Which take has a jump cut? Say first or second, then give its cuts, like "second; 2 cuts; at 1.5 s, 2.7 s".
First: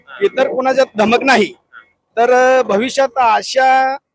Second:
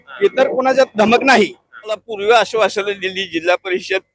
second; 1 cut; at 2.0 s